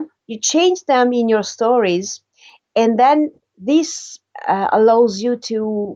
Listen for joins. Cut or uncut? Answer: uncut